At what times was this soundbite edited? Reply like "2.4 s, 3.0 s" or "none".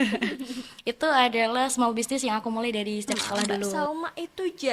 3.7 s